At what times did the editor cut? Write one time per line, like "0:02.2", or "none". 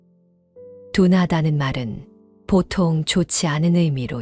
0:00.9